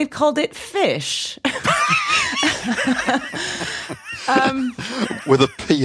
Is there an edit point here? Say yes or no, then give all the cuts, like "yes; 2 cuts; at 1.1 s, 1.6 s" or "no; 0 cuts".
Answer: yes; 1 cut; at 4.8 s